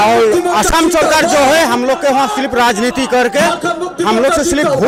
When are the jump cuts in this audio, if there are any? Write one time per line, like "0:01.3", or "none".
none